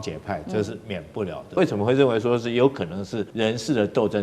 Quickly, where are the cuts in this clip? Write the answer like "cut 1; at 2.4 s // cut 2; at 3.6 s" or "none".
cut 1; at 1.6 s // cut 2; at 3.2 s